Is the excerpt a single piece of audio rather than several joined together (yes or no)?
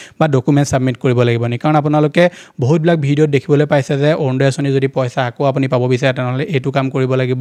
yes